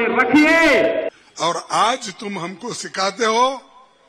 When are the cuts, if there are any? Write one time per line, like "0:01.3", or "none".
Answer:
0:01.1